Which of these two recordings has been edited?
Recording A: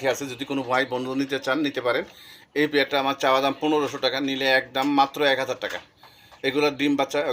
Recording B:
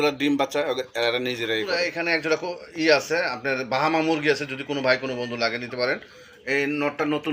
B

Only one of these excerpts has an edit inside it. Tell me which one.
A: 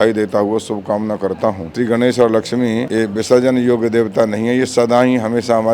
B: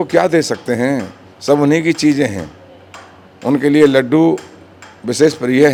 A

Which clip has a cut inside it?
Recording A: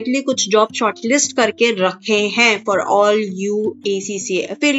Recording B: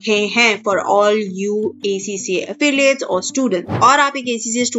B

